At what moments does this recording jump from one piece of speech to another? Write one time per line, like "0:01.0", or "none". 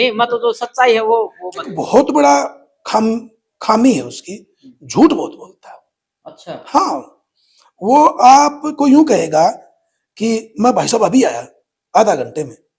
0:01.8